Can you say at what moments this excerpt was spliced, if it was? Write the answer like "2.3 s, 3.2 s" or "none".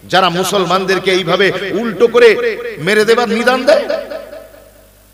none